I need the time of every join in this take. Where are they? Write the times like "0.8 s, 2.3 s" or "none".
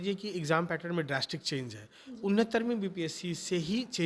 none